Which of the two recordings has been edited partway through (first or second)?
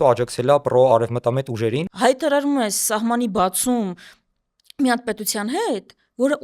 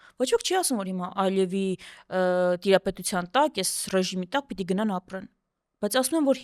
first